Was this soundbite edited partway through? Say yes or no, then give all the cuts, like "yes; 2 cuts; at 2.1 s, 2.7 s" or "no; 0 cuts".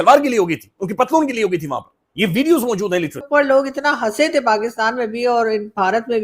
yes; 1 cut; at 3.2 s